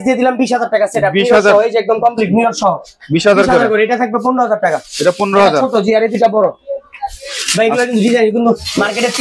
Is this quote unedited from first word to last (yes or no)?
yes